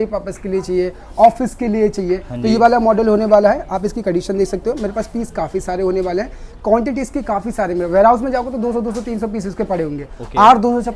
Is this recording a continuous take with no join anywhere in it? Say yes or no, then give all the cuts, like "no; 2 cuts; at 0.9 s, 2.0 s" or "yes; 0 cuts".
yes; 0 cuts